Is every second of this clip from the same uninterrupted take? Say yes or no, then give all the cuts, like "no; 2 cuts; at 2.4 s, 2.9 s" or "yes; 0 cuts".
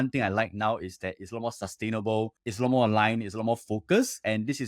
yes; 0 cuts